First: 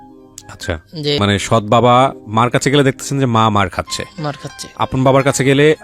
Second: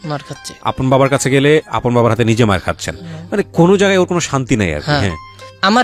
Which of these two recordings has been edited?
first; 1 cut; at 1.2 s

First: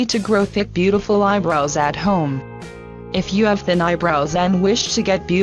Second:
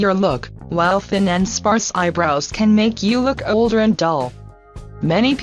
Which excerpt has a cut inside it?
second; 1 cut; at 3.1 s

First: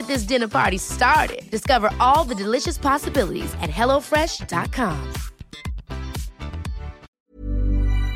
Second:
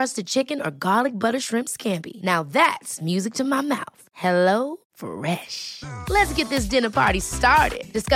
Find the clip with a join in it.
first; 1 cut; at 7.0 s

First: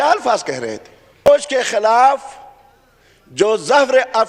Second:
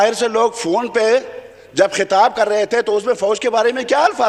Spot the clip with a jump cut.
first; 1 cut; at 1.3 s

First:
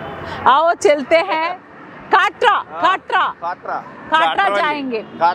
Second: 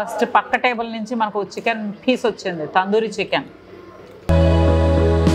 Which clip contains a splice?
second; 1 cut; at 4.3 s

